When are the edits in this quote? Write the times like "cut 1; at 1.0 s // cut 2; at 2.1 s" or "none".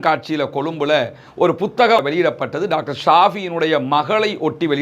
cut 1; at 2.0 s